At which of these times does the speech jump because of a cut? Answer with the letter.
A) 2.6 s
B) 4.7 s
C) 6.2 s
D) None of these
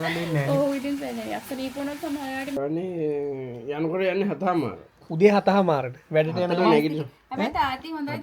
A